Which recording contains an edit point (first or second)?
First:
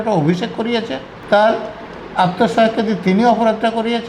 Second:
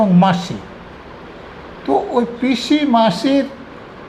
first